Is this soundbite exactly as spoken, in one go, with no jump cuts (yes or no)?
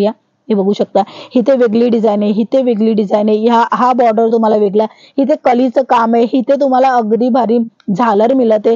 yes